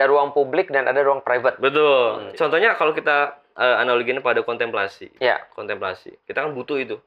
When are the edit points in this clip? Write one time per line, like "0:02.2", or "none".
0:02.2